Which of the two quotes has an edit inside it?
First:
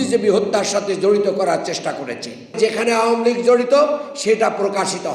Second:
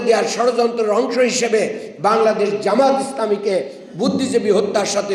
first; 1 cut; at 2.6 s

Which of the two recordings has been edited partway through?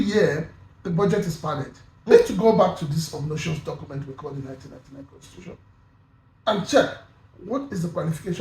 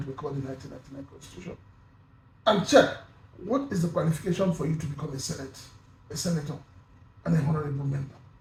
first; 1 cut; at 2.1 s

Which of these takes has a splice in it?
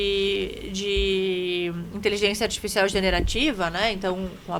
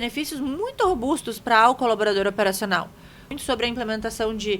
second; 1 cut; at 3.3 s

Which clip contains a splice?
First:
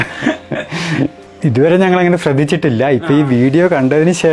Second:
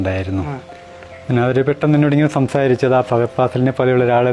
first; 1 cut; at 1.2 s

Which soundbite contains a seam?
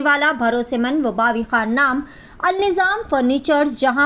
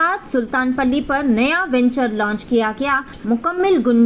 second; 1 cut; at 3.2 s

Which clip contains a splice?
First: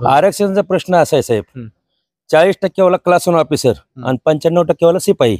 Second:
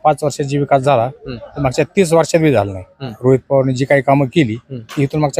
second; 1 cut; at 3.2 s

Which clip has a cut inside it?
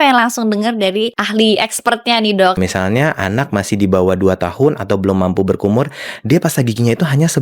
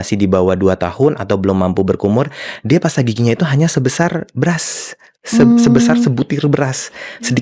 first; 2 cuts; at 1.2 s, 2.6 s

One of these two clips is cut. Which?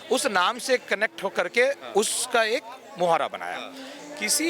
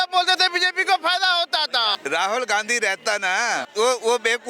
second; 2 cuts; at 2.0 s, 3.7 s

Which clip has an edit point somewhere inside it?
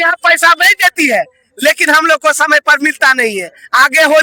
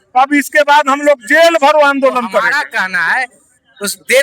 second; 1 cut; at 2.5 s

